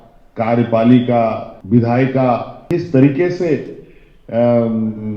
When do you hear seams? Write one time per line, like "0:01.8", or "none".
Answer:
0:01.5
0:02.5